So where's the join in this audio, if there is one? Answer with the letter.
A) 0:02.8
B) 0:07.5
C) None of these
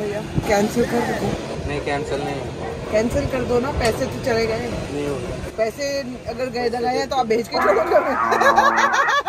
C